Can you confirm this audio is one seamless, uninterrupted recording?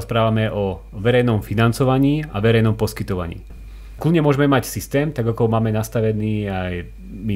no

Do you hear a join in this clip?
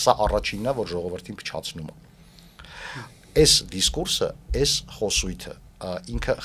no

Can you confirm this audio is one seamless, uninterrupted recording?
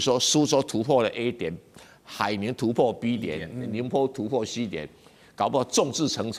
yes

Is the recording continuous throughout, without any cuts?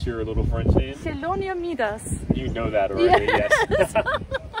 yes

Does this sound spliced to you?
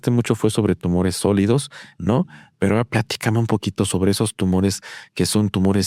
no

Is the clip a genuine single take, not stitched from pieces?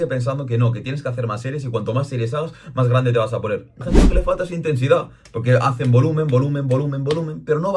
no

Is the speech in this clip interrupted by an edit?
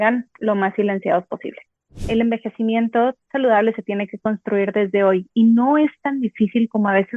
yes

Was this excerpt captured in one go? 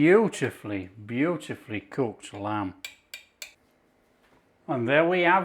no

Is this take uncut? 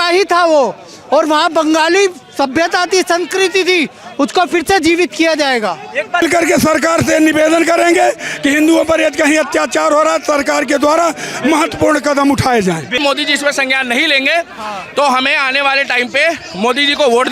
no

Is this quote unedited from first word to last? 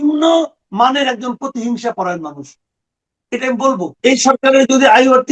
no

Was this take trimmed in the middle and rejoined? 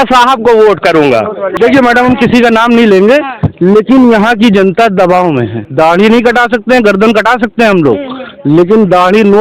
yes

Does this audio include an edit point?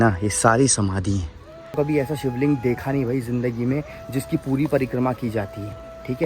yes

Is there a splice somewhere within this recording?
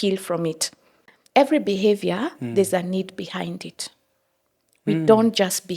yes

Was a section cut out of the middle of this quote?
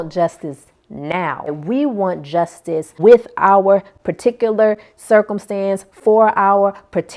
yes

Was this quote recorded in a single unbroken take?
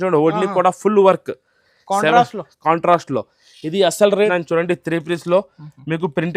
no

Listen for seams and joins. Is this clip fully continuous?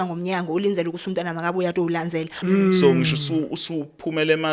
no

